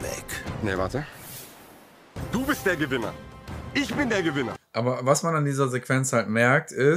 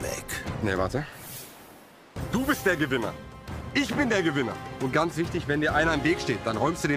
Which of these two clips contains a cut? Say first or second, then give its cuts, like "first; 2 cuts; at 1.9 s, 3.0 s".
first; 1 cut; at 4.6 s